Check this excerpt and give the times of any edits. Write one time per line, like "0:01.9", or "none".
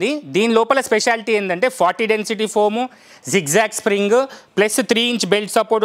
none